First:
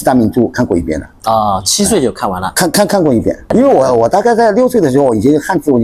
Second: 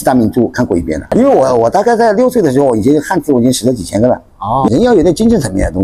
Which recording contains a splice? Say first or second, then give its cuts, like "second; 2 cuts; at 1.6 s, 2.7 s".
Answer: second; 2 cuts; at 1.0 s, 4.7 s